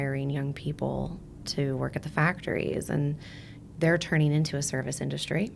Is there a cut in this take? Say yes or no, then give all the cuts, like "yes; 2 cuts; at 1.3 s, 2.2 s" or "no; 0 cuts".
no; 0 cuts